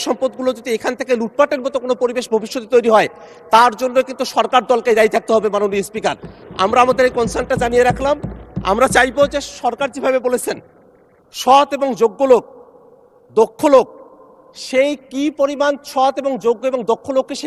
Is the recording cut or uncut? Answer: uncut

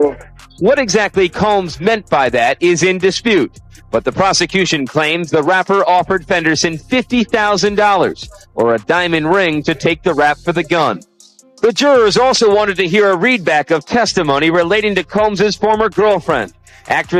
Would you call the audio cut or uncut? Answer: uncut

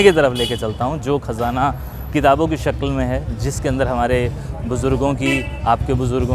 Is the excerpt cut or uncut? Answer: uncut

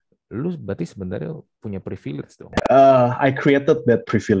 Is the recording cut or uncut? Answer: cut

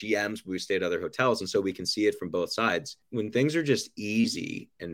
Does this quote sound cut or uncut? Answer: cut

